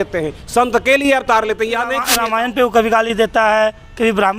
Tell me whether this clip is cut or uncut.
cut